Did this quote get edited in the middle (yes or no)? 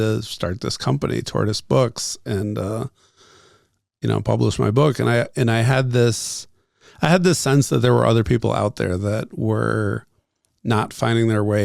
no